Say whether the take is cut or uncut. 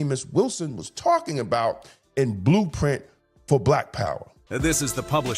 cut